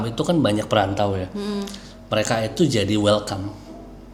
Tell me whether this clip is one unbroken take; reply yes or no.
yes